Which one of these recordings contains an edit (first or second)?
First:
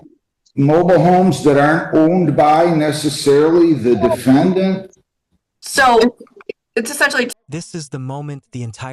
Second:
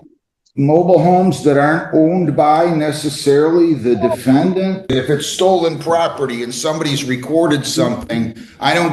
second